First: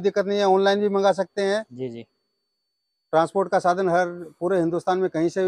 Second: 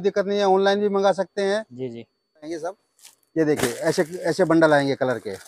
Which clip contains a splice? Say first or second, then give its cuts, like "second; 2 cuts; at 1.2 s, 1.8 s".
second; 1 cut; at 2.5 s